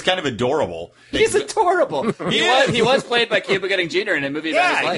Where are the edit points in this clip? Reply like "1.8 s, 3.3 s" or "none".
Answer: 1.0 s